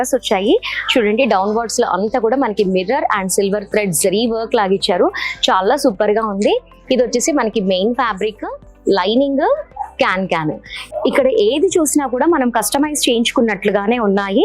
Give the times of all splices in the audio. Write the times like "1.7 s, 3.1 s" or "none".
none